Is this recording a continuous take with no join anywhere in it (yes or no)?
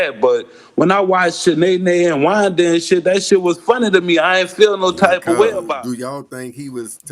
no